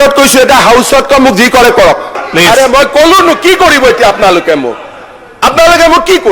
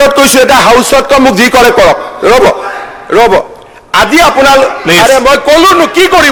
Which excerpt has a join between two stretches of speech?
first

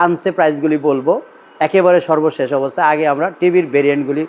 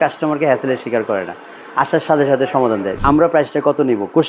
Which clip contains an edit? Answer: second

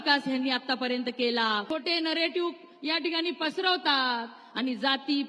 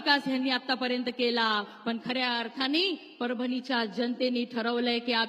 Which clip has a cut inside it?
first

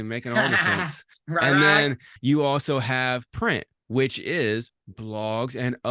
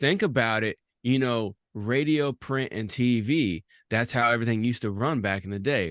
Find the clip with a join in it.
first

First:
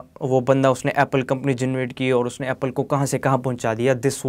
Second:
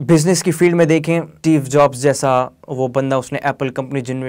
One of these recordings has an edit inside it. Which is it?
second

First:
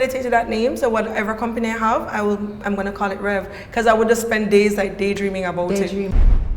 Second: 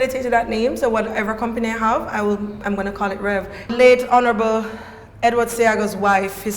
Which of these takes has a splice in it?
second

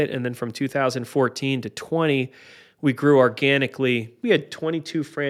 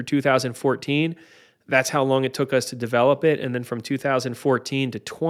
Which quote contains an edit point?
first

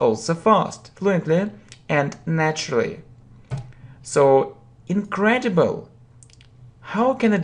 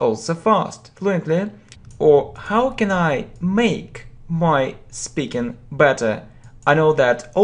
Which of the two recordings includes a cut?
first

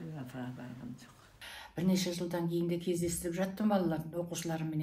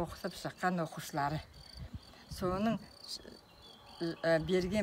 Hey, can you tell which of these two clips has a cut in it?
first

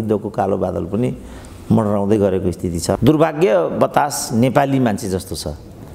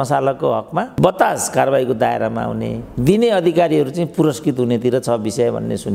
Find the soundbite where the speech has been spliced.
first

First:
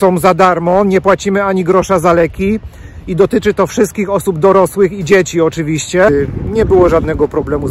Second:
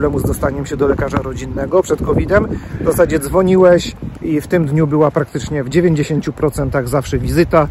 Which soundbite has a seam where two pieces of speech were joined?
first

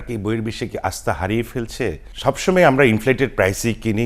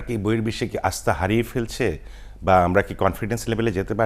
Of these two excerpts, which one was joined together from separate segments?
first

